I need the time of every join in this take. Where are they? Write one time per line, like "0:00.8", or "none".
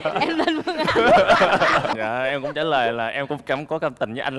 0:01.9